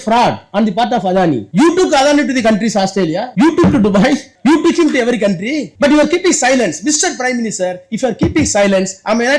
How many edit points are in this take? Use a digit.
4